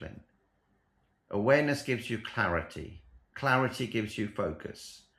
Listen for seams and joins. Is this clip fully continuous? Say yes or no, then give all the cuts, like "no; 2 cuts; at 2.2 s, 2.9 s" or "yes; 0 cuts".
yes; 0 cuts